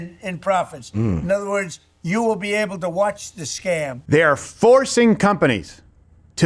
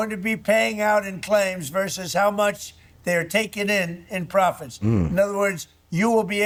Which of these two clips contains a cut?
first; 1 cut; at 3.9 s

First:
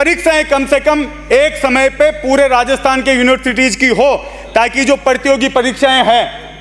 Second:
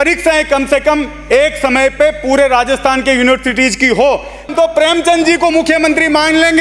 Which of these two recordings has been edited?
second; 1 cut; at 4.5 s

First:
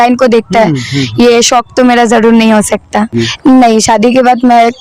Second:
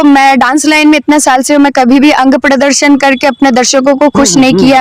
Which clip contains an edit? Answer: first; 1 cut; at 3.2 s

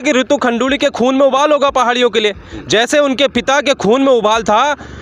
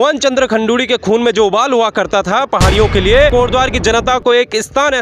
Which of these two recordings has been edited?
second; 1 cut; at 3.3 s

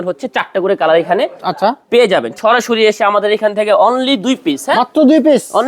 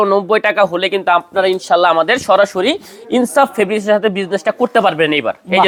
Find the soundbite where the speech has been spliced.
first; 1 cut; at 2.3 s

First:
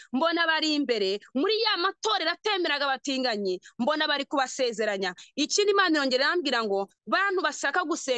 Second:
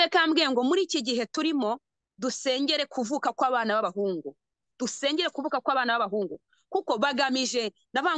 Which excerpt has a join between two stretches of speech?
first; 1 cut; at 5.2 s

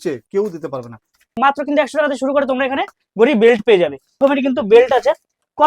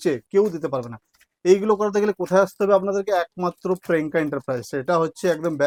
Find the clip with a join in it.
first; 2 cuts; at 1.4 s, 4.2 s

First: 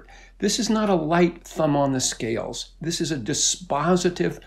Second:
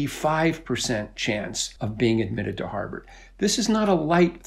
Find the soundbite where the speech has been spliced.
second; 1 cut; at 1.6 s

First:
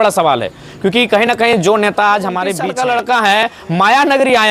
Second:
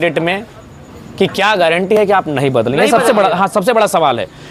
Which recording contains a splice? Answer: first; 1 cut; at 2.6 s

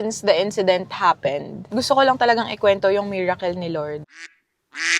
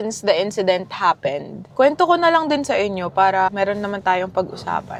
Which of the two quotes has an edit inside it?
first; 2 cuts; at 1.6 s, 4.1 s

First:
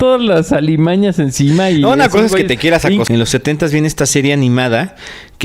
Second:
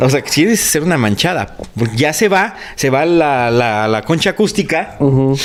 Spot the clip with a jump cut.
first; 1 cut; at 3.1 s

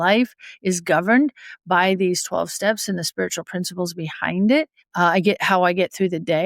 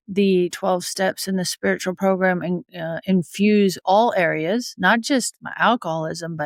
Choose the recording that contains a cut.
first; 1 cut; at 4.8 s

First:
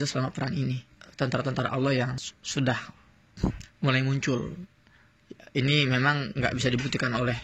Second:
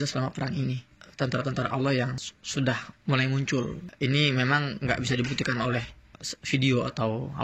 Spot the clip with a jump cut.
second; 2 cuts; at 2.9 s, 3.9 s

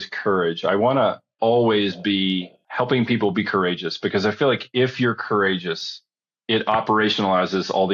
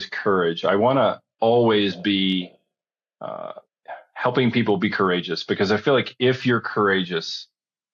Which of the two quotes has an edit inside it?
first; 1 cut; at 2.6 s

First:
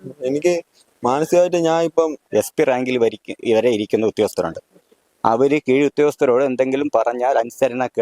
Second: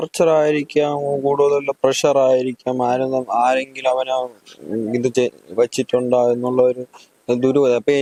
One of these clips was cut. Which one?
first; 1 cut; at 2.2 s

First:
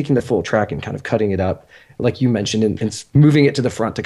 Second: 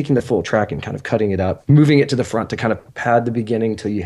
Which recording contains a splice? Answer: second; 2 cuts; at 1.6 s, 2.9 s

